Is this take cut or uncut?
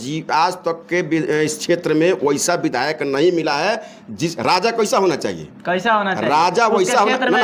uncut